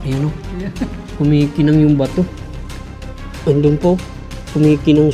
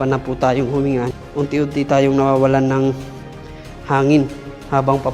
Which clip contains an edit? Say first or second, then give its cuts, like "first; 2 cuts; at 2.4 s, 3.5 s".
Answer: second; 1 cut; at 1.1 s